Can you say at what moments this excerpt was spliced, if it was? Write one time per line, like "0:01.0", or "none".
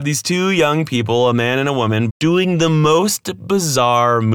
0:02.1

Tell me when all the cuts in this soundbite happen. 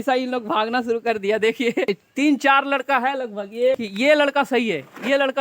0:01.9
0:03.9

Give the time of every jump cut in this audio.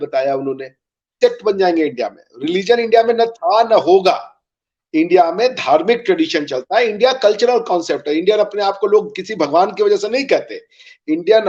0:01.2

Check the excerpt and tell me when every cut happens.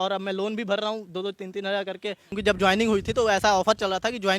0:02.3

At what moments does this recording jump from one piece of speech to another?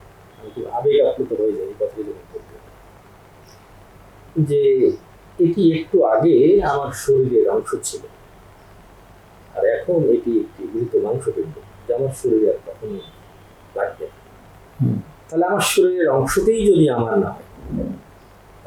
none

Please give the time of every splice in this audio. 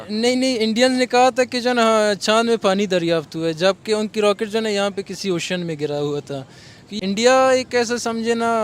0:06.9

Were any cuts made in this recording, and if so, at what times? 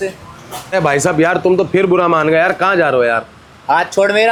none

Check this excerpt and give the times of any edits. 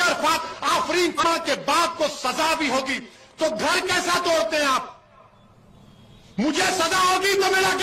0:01.2

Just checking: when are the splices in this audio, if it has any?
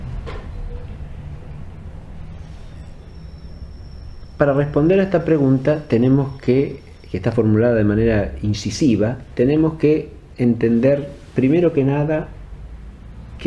none

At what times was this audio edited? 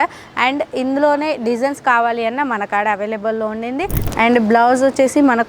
0:04.0

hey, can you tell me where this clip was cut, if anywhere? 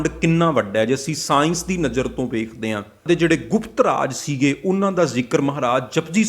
0:03.1

